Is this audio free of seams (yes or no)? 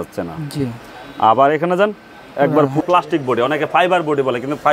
no